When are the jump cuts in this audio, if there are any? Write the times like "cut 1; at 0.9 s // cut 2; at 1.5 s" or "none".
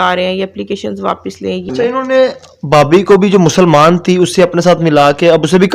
cut 1; at 1.7 s